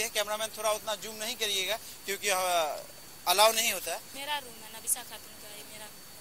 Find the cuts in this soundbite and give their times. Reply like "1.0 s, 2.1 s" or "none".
4.1 s

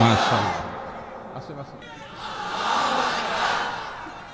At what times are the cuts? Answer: 1.8 s

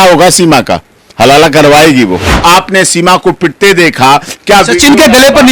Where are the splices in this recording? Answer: 2.3 s

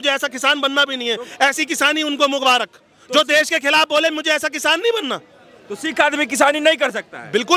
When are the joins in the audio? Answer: none

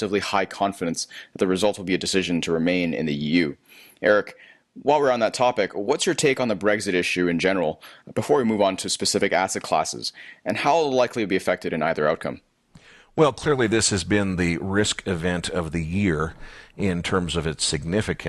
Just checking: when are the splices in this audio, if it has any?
9.4 s

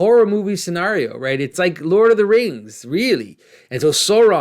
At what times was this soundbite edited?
1.5 s

